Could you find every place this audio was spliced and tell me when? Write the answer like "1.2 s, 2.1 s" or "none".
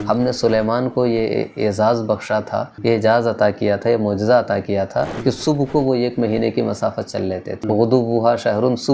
2.7 s, 5.1 s, 7.6 s

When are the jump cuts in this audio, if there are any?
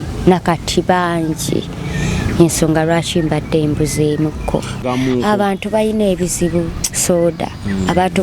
4.8 s

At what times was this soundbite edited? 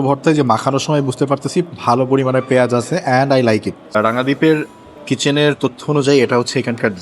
3.8 s

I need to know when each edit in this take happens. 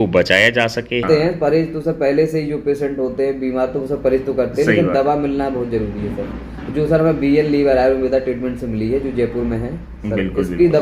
1.0 s

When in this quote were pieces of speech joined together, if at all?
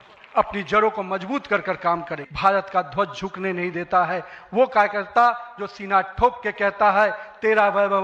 2.2 s

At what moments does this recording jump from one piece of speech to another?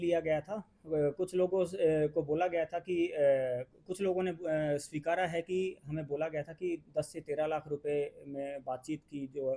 none

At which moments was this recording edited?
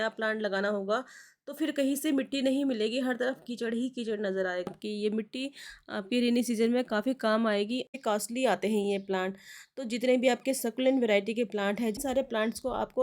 4.7 s, 7.9 s, 12.0 s

